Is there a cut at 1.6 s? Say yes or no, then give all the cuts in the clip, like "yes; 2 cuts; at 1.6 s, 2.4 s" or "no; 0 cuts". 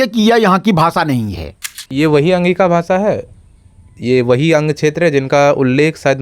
yes; 1 cut; at 1.6 s